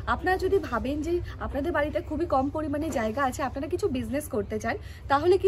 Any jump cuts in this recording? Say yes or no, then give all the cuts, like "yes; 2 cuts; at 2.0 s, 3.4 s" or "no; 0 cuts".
no; 0 cuts